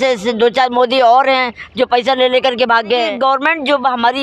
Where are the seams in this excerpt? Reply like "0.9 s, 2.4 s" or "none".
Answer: 3.1 s